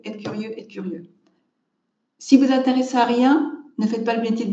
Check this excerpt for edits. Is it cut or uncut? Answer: uncut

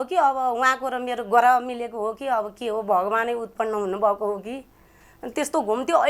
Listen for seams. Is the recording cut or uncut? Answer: cut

